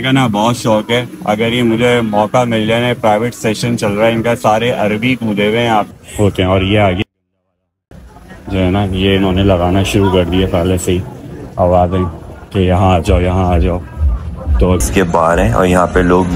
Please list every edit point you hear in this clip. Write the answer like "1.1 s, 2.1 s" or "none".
6.0 s, 14.8 s